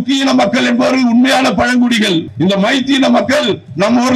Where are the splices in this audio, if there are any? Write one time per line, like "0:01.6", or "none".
0:02.3